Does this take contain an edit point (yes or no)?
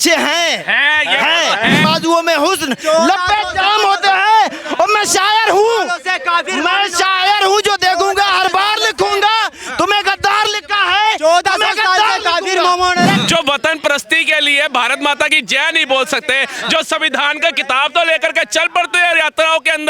yes